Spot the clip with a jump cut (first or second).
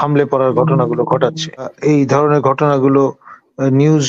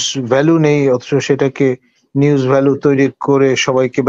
first